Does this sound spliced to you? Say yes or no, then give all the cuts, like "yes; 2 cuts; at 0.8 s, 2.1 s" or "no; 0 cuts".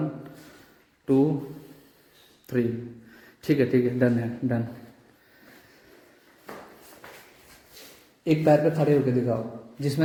no; 0 cuts